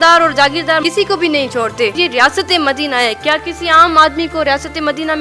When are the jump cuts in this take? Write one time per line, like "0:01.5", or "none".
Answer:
0:01.9